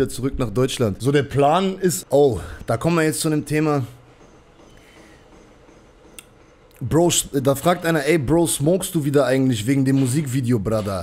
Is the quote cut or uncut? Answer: cut